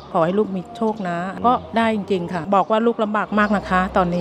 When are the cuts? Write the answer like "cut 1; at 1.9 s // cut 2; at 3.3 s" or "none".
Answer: cut 1; at 2.5 s